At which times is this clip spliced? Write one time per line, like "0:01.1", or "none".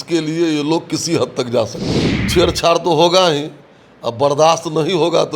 0:02.2

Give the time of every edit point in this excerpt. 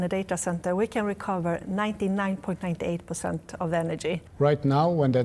0:04.3

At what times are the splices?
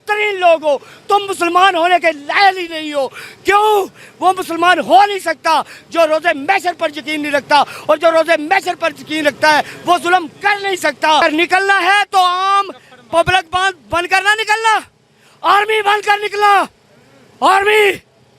0:11.2

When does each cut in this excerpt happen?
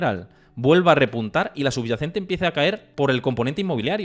0:02.9

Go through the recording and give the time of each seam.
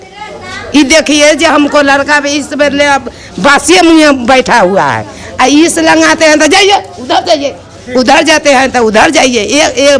none

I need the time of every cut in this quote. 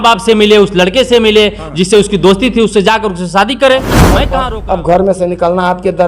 0:04.3

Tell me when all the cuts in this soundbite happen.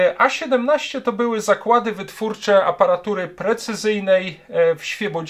none

